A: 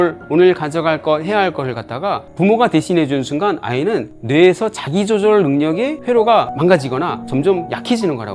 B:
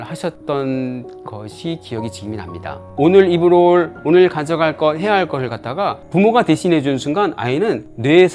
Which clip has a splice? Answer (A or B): B